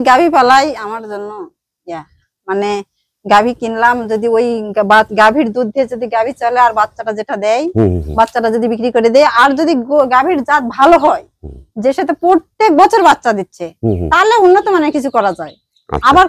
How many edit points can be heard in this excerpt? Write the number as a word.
zero